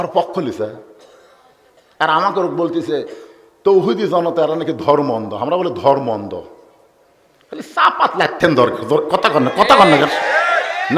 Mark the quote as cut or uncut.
uncut